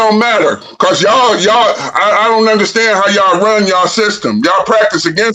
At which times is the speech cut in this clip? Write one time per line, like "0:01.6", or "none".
none